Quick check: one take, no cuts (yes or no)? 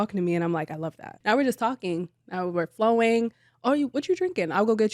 no